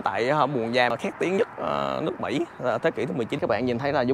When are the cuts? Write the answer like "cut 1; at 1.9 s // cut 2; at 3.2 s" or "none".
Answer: cut 1; at 0.9 s // cut 2; at 3.4 s

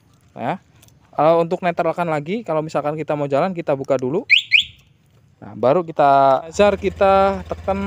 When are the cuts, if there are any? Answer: cut 1; at 6.5 s

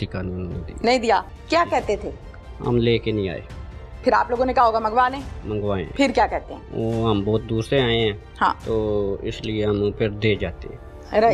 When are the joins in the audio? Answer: none

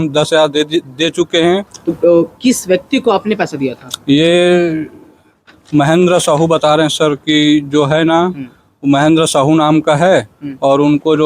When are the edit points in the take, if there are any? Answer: cut 1; at 1.8 s

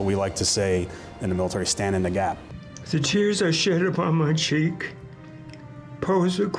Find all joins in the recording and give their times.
cut 1; at 2.5 s

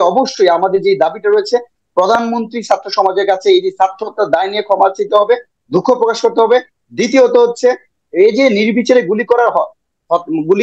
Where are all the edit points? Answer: none

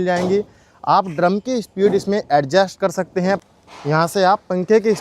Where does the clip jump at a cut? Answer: cut 1; at 3.4 s

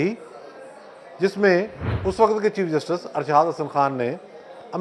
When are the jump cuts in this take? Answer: cut 1; at 1.8 s

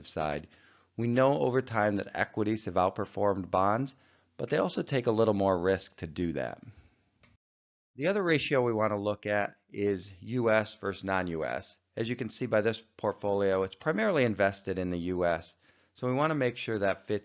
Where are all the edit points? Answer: cut 1; at 4.8 s

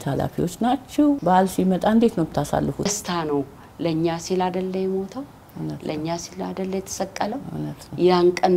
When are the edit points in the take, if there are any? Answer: cut 1; at 1.2 s // cut 2; at 2.9 s

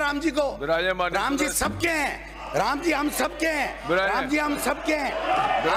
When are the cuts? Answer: none

